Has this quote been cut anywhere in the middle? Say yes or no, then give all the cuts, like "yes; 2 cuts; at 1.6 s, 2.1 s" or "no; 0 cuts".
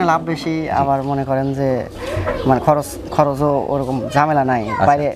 no; 0 cuts